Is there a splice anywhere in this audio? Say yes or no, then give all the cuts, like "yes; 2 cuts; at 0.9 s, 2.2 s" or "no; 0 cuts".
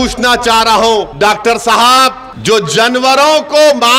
yes; 2 cuts; at 1.1 s, 2.3 s